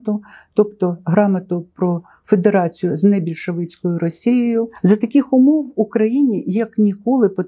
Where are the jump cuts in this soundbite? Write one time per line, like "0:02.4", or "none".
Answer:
0:04.7